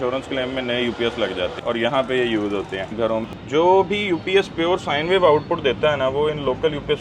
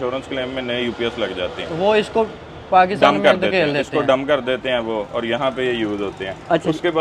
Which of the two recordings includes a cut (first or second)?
first